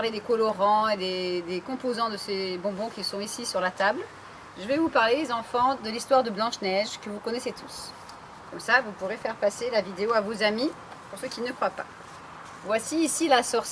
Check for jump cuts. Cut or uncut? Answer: cut